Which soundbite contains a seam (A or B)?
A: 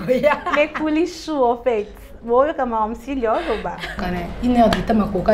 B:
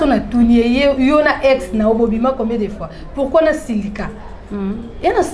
A